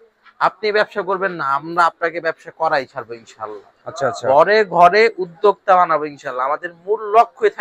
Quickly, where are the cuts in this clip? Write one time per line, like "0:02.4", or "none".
none